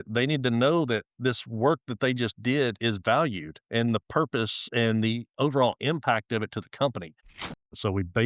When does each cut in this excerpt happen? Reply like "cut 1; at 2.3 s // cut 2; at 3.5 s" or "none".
cut 1; at 7.3 s